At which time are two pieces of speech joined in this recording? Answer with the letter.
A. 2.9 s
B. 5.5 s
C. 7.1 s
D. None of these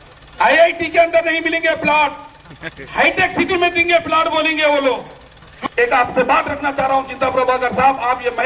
B